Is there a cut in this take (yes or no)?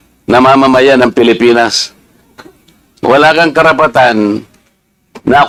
no